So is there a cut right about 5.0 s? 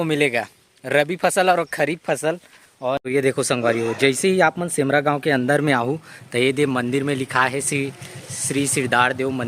no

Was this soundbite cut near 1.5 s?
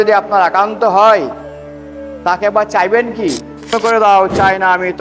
no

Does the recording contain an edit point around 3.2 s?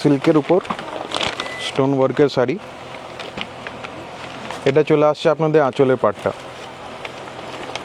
no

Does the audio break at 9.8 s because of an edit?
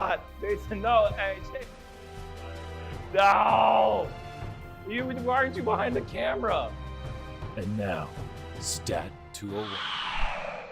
yes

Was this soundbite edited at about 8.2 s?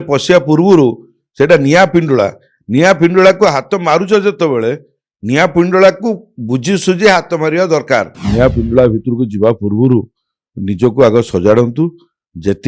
yes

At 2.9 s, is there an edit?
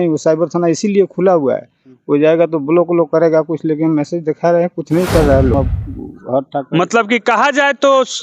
no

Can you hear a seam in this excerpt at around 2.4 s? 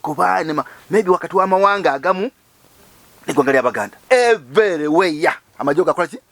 no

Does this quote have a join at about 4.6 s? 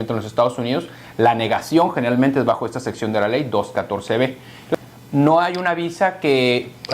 yes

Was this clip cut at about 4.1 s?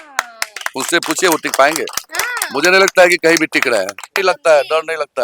yes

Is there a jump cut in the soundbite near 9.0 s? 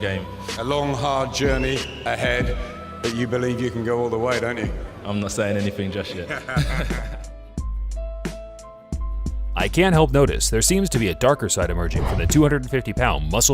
no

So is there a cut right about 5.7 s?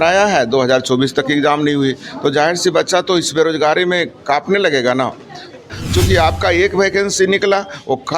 yes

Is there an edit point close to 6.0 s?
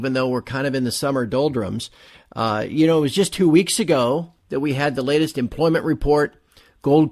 yes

